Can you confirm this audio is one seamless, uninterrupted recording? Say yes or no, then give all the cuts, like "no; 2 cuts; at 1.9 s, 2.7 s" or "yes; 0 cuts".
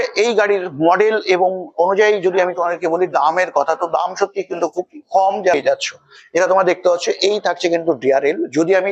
no; 1 cut; at 5.5 s